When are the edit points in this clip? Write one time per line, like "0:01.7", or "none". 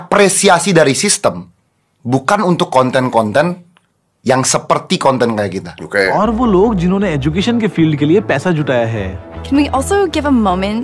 0:06.1